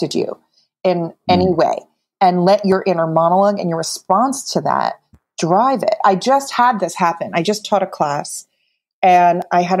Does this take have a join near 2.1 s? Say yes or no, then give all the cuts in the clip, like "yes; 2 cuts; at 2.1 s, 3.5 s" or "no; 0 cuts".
yes; 1 cut; at 2.1 s